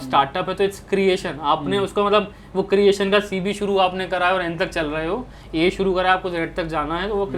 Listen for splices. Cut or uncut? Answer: uncut